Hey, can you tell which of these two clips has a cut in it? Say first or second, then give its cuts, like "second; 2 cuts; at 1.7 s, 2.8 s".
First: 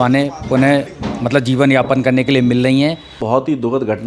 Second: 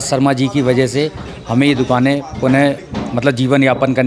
first; 1 cut; at 3.1 s